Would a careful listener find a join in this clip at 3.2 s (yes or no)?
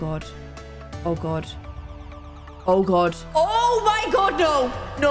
yes